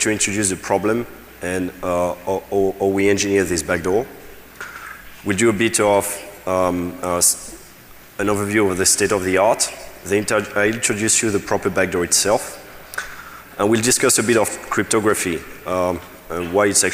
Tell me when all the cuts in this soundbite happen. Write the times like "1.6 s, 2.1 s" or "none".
11.6 s